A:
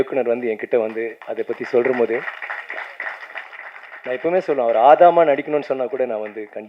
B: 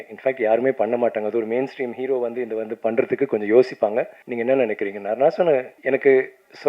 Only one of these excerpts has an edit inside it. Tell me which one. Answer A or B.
B